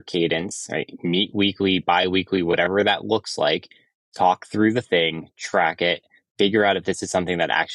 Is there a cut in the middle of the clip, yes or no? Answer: no